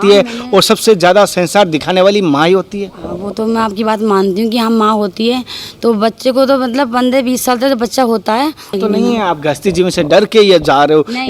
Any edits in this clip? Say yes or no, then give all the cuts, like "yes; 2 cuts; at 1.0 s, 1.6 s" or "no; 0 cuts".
yes; 1 cut; at 8.8 s